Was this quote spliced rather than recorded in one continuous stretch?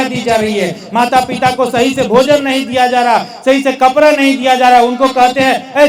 no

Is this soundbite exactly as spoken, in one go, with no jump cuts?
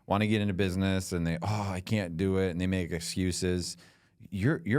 yes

